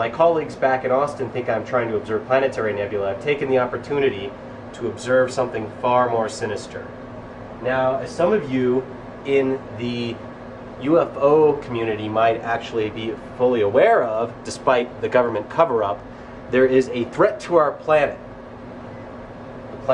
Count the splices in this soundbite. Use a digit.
0